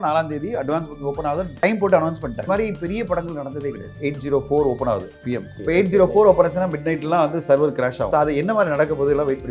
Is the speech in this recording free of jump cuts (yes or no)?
no